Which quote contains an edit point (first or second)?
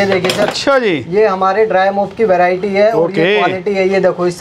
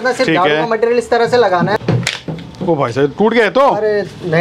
second